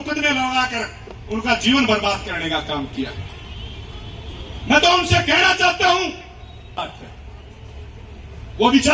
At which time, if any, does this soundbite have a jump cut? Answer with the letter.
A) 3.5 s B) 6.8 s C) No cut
B